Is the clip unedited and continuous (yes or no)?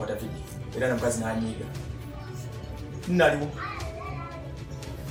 yes